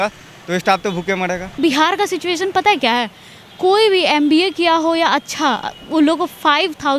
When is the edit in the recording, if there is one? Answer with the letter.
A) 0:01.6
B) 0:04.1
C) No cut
A